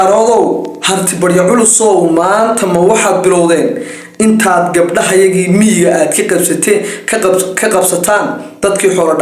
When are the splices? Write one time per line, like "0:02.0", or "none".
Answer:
none

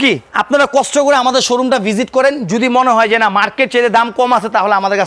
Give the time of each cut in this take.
none

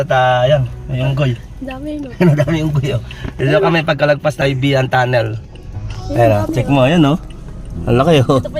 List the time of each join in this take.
0:04.4

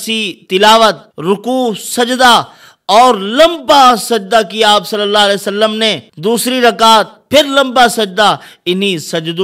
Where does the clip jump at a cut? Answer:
0:01.1
0:06.1

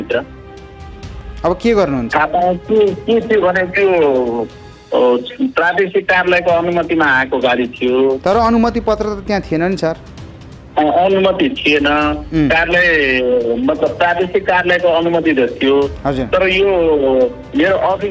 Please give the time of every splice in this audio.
none

